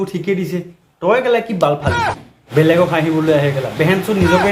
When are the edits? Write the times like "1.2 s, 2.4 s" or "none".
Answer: 2.4 s